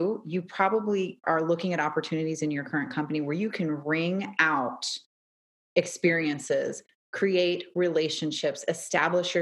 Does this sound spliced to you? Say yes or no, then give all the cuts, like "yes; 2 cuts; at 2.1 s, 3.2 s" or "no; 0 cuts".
yes; 1 cut; at 1.2 s